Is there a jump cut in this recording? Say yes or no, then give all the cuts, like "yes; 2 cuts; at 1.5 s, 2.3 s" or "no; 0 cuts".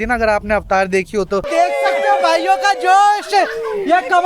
yes; 1 cut; at 1.5 s